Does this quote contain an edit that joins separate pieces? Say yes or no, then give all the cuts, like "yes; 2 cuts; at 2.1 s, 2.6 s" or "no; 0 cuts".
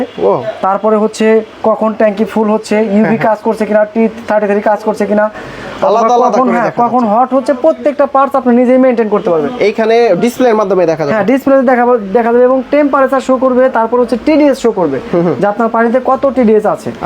no; 0 cuts